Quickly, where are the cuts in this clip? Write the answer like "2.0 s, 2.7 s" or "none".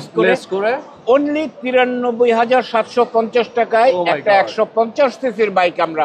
none